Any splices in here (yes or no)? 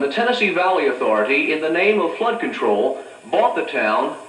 no